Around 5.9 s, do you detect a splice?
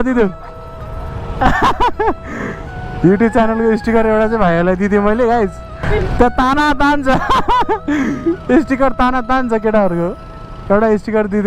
yes; 1 cut; at 5.9 s

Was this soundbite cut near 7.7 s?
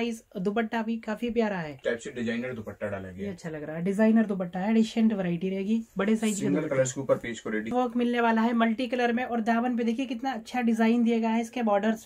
yes; 2 cuts; at 1.7 s, 7.7 s

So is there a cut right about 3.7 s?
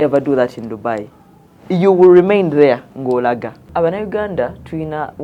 yes; 1 cut; at 3.7 s

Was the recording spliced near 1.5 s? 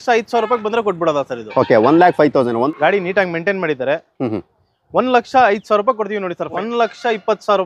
no; 2 cuts; at 2.7 s, 6.5 s

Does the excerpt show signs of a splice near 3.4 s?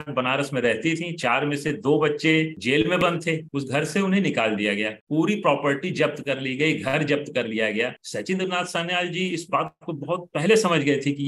yes; 2 cuts; at 3.4 s, 8.0 s

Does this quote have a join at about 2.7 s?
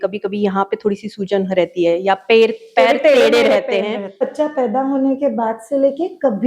no; 1 cut; at 4.2 s

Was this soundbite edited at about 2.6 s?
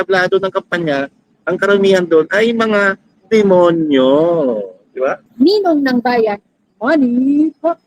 no; 1 cut; at 5.2 s

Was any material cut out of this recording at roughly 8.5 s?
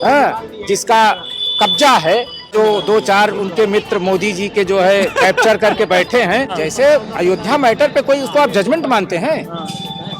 no; 2 cuts; at 2.5 s, 6.5 s

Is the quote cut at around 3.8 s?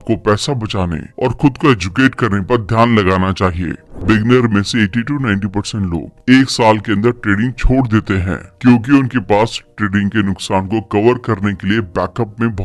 yes; 1 cut; at 3.8 s

